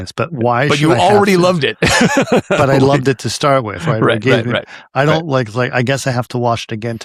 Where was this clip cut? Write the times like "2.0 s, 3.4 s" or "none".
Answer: none